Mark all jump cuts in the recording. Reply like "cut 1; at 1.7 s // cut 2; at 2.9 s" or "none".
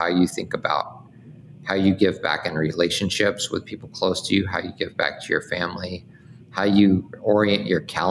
none